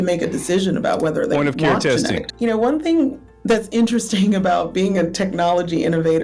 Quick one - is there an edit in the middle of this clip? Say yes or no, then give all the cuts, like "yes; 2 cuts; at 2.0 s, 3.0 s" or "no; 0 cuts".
yes; 1 cut; at 2.3 s